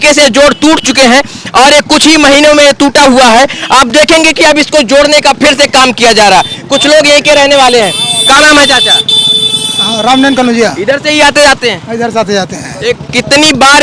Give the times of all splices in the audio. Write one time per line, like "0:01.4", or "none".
none